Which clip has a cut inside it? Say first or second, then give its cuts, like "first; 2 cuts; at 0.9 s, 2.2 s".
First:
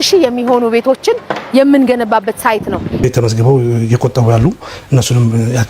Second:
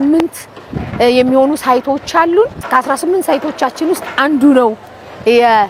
first; 1 cut; at 3.0 s